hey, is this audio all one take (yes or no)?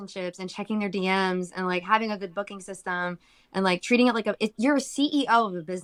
yes